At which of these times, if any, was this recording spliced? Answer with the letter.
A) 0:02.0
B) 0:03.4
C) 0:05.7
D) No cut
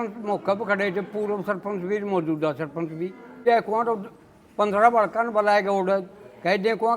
B